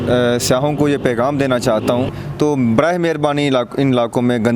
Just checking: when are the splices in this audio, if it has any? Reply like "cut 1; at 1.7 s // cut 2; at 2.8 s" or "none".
cut 1; at 2.1 s